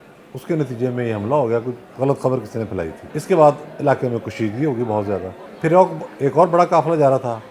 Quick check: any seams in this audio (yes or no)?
yes